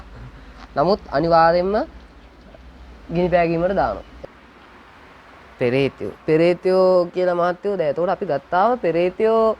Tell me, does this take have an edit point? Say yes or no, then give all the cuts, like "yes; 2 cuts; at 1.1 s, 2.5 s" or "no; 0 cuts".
yes; 1 cut; at 4.1 s